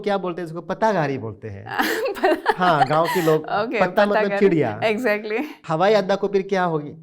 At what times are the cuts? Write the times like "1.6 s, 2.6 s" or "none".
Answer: 5.6 s